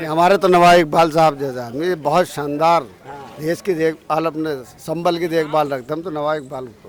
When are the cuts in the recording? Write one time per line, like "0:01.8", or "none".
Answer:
none